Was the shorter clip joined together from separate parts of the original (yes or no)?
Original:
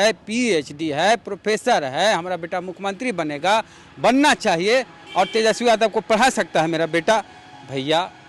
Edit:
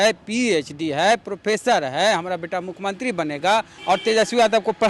yes